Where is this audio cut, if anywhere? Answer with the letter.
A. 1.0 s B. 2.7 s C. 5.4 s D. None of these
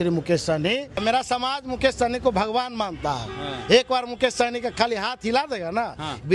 A